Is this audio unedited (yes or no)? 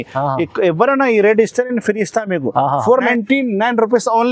no